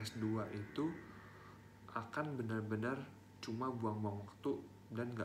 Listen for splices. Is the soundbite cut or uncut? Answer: uncut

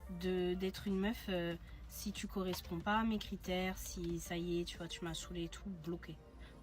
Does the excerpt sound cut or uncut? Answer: uncut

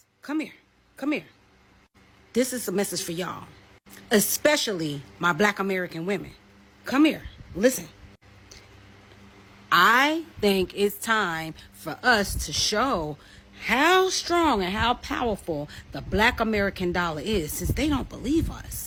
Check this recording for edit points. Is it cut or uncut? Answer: uncut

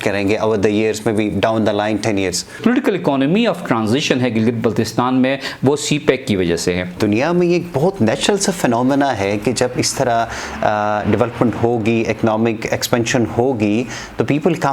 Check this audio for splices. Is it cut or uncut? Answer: cut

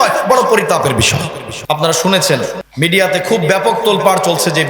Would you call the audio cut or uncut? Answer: cut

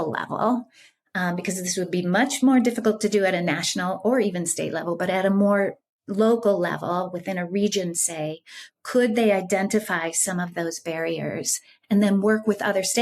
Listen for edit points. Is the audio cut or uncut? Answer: uncut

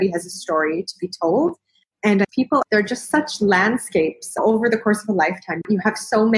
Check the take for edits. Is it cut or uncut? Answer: cut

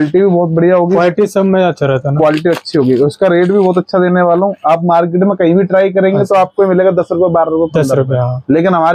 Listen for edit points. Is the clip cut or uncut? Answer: uncut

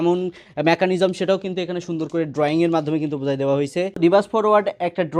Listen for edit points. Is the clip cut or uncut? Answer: cut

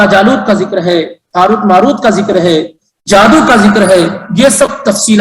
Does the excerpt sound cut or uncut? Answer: uncut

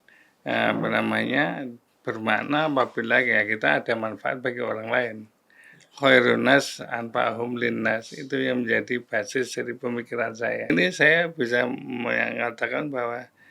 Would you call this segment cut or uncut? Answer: cut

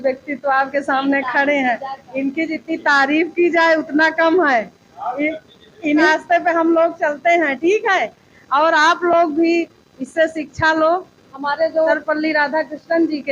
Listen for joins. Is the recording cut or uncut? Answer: cut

